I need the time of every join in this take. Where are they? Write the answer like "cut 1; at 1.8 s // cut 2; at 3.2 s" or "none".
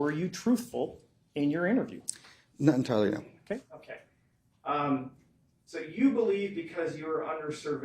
cut 1; at 3.4 s